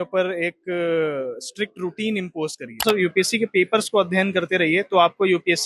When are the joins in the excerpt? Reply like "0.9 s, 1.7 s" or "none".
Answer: 2.8 s